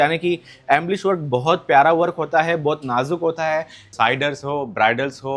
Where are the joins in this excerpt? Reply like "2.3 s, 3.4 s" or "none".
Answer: 3.8 s